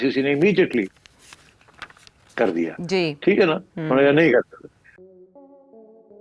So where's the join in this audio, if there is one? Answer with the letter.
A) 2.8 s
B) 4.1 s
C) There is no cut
C